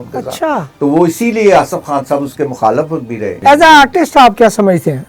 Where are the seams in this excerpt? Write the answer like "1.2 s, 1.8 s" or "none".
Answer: 3.4 s